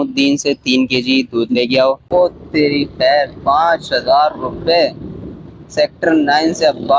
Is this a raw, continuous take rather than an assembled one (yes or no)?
no